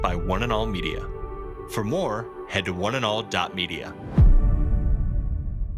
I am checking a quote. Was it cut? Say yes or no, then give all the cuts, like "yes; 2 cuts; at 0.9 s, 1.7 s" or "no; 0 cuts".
no; 0 cuts